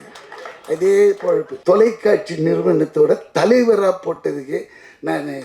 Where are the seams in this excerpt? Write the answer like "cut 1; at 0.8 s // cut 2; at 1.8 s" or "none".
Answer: cut 1; at 1.5 s